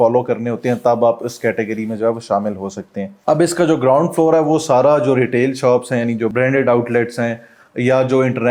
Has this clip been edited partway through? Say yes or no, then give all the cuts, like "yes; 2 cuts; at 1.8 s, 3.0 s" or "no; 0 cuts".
no; 0 cuts